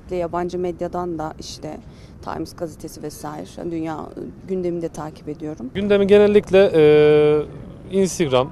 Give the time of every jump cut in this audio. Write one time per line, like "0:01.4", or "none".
0:05.7